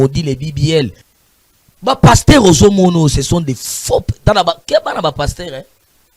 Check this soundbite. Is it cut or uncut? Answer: cut